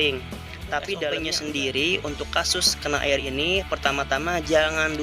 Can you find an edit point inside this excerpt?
yes; 1 cut; at 1.3 s

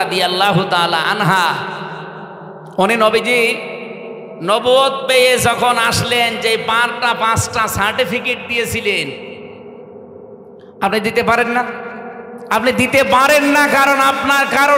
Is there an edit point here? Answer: no; 0 cuts

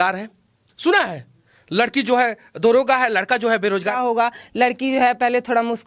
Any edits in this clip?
yes; 1 cut; at 4.0 s

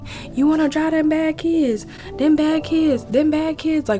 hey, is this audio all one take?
yes; 0 cuts

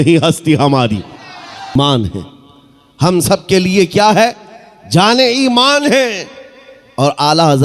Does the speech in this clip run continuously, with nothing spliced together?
no; 1 cut; at 1.8 s

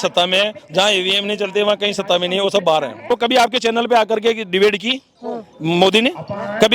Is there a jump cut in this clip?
yes; 1 cut; at 3.1 s

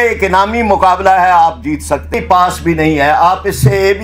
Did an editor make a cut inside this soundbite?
yes; 1 cut; at 2.1 s

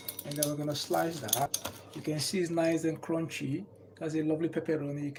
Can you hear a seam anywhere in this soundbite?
no; 0 cuts

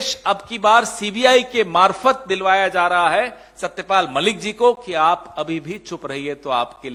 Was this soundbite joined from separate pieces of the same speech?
no; 0 cuts

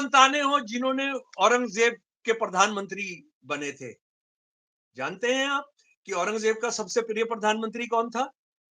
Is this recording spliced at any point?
no; 0 cuts

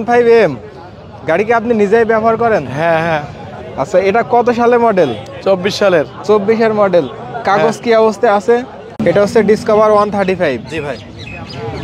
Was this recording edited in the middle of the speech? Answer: yes; 1 cut; at 8.8 s

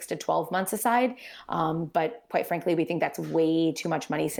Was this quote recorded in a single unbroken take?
yes; 0 cuts

